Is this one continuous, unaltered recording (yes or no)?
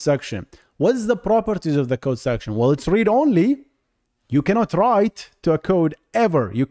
yes